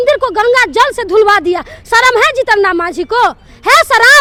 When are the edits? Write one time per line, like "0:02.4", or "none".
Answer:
none